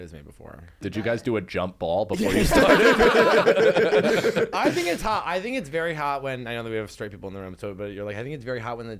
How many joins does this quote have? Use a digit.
1